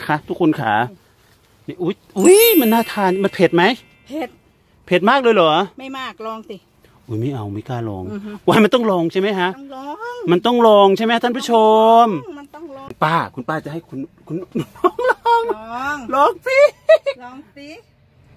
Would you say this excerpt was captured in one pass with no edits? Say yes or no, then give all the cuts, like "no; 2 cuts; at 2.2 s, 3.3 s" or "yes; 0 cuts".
no; 1 cut; at 12.9 s